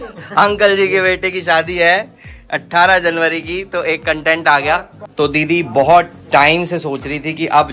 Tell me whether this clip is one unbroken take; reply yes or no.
no